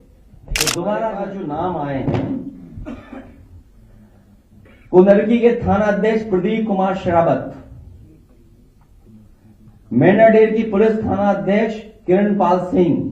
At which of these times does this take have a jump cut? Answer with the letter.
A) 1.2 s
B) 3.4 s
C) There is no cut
A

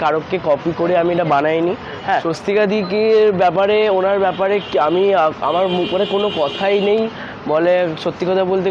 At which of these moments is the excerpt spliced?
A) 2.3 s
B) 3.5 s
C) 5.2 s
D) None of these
A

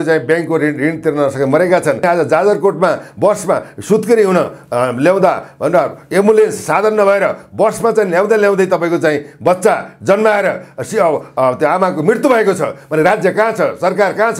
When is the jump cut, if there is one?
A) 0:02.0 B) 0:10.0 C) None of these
A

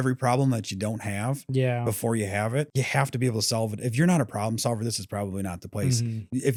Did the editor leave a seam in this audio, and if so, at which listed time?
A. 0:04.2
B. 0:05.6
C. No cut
C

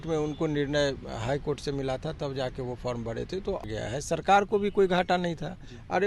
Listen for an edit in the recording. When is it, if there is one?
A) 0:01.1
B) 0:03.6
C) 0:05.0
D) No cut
B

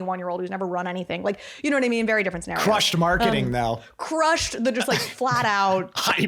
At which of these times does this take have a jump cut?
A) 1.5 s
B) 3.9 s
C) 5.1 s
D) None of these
B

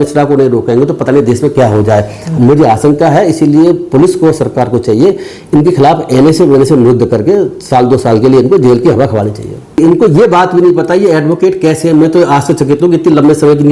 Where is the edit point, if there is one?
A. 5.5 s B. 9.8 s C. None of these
B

